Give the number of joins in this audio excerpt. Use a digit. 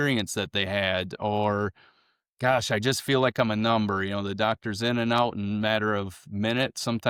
0